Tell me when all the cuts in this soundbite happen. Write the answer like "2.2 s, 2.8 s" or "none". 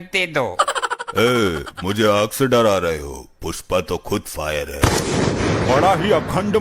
none

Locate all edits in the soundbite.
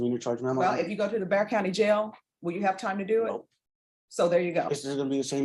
none

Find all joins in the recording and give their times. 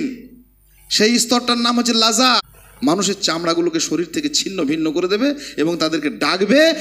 2.5 s

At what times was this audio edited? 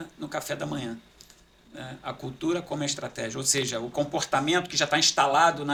none

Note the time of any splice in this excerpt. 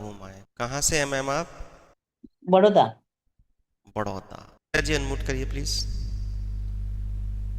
4.8 s

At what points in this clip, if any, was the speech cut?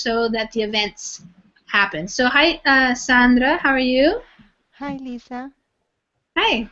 4.2 s

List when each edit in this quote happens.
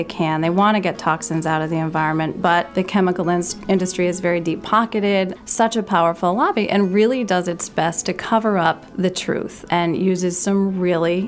2.7 s, 5.4 s, 9.4 s

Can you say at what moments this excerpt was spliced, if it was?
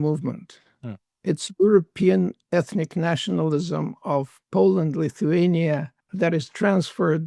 6.0 s

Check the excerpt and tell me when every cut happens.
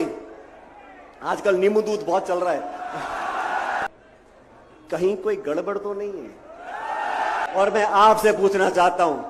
3.8 s, 7.4 s

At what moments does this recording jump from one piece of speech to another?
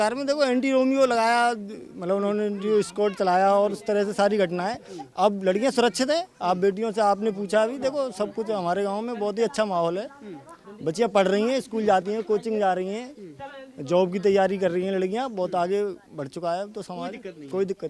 none

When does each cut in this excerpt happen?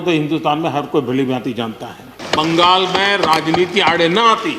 2.2 s

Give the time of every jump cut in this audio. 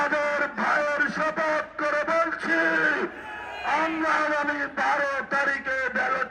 none

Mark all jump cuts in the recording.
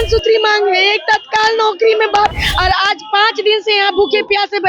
2.3 s

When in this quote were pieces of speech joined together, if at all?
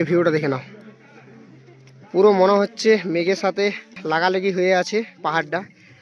4.0 s

